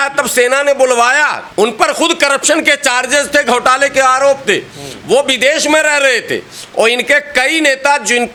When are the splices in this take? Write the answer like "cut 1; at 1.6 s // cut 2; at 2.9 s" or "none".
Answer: none